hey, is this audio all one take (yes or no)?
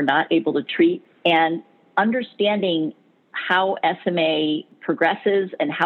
no